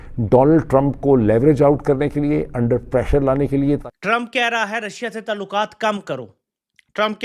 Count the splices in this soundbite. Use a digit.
1